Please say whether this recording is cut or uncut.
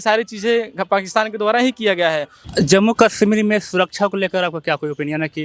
uncut